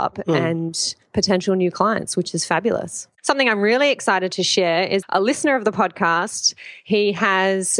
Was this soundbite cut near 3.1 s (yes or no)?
yes